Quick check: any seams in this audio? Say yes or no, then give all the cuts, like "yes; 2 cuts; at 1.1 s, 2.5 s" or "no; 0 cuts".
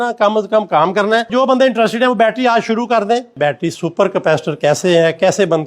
yes; 2 cuts; at 1.3 s, 3.4 s